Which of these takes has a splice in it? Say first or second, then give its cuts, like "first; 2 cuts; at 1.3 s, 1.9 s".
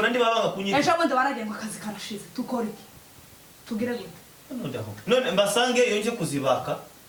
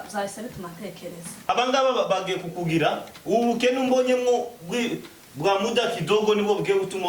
second; 1 cut; at 1.5 s